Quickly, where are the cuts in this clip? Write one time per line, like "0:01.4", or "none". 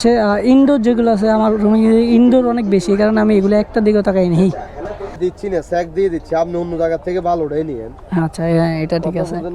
0:05.2